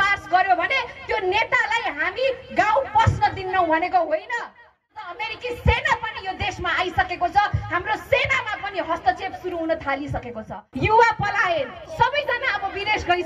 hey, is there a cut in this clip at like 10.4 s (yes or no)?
yes